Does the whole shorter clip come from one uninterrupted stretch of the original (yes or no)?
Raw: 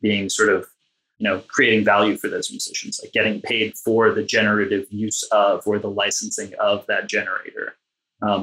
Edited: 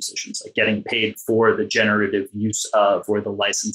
yes